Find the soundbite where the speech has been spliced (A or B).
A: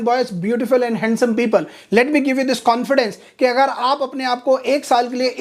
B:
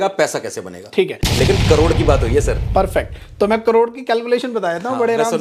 B